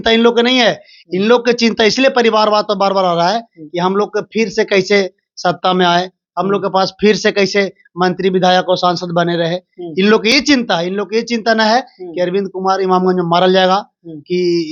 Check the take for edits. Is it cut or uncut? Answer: uncut